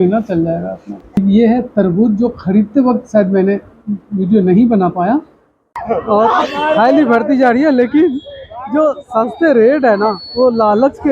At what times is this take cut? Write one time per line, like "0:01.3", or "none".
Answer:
0:05.3